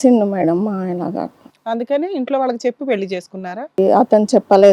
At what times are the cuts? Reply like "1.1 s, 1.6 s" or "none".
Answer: 3.8 s